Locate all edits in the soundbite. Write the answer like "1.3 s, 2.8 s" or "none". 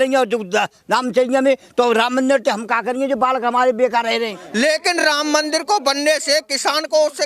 4.4 s